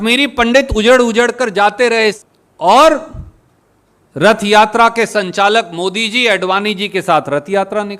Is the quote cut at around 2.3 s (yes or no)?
yes